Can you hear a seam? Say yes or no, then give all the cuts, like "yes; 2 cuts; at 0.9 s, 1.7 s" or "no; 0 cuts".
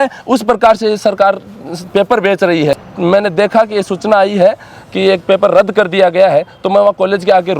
yes; 1 cut; at 2.7 s